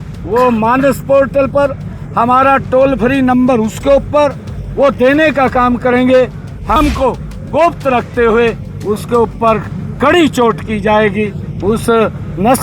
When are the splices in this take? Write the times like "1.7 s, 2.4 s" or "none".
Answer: 6.8 s